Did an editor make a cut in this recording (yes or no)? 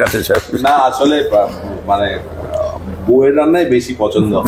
no